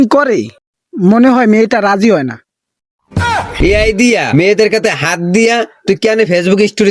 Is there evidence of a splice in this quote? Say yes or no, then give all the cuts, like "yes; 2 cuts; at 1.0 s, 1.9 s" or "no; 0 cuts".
yes; 1 cut; at 3.5 s